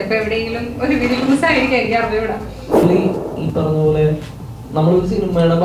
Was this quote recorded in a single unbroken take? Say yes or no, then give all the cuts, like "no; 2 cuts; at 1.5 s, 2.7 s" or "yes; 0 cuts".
no; 1 cut; at 2.6 s